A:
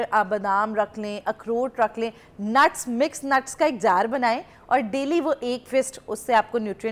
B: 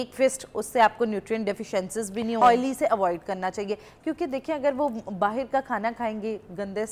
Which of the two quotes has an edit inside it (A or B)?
B